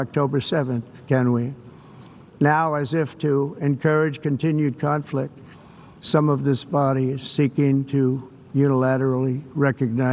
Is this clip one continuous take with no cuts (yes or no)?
yes